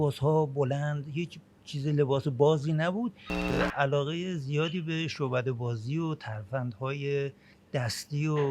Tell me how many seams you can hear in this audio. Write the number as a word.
one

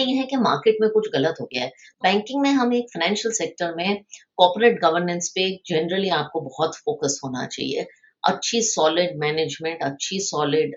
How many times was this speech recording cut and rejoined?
one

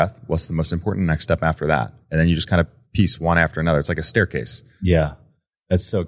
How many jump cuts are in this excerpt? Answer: one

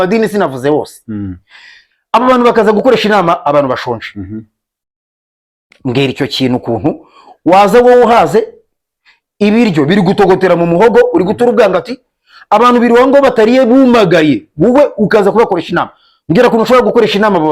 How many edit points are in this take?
zero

